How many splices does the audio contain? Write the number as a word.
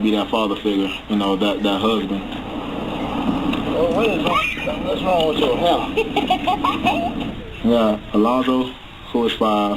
one